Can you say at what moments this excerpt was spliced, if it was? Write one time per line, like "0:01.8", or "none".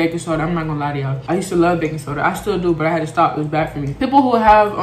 none